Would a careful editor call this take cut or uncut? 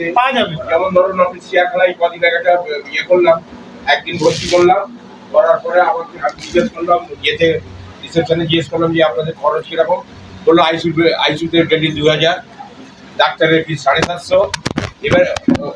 uncut